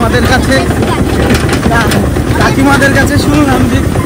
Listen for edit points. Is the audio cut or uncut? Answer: uncut